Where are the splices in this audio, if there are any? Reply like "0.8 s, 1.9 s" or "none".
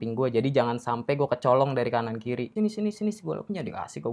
2.5 s